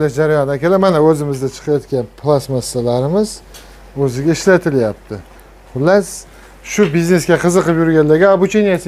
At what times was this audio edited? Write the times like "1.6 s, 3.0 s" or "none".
none